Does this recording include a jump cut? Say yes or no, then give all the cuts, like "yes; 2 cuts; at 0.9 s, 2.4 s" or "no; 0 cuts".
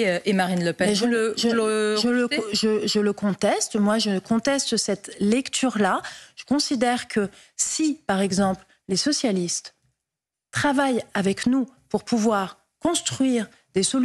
yes; 1 cut; at 9.2 s